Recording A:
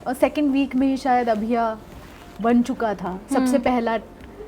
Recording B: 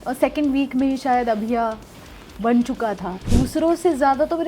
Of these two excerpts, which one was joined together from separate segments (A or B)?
B